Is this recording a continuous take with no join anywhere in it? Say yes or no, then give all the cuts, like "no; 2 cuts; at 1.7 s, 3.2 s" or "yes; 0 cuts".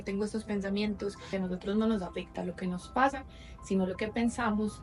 no; 1 cut; at 1.3 s